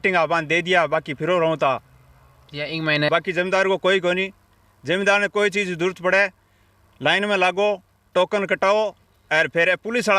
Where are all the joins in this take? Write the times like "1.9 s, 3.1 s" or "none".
3.1 s